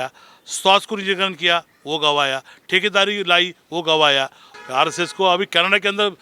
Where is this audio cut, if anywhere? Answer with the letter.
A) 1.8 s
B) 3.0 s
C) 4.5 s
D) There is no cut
C